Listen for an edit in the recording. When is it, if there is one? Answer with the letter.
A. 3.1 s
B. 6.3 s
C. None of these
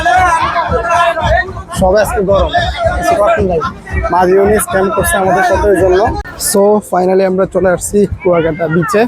B